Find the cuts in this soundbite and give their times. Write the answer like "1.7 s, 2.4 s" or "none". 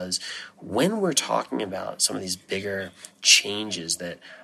none